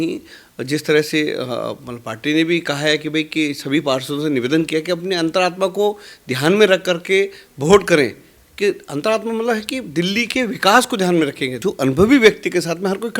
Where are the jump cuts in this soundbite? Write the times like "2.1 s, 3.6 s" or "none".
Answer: 11.6 s